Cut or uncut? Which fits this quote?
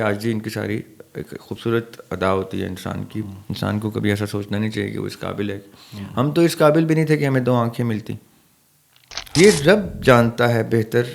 cut